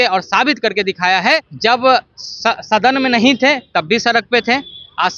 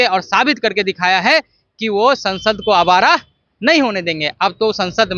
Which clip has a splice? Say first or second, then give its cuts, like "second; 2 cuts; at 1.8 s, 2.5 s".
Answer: first; 1 cut; at 1.5 s